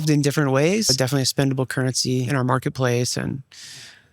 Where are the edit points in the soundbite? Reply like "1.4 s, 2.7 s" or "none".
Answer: 0.9 s, 2.3 s

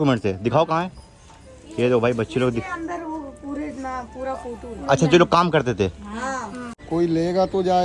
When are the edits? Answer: 6.7 s

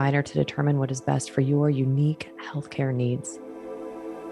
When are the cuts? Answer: 3.3 s

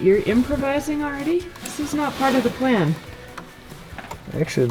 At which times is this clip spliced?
none

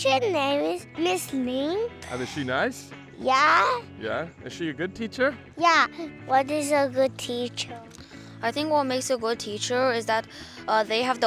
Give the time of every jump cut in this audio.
0.9 s, 2.0 s, 6.1 s

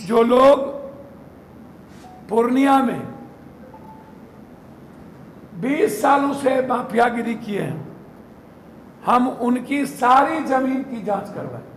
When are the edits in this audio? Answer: none

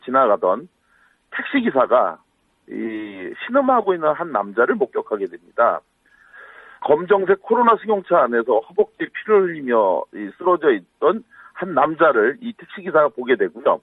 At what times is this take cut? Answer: none

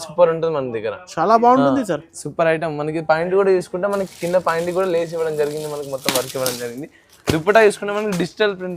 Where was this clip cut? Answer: none

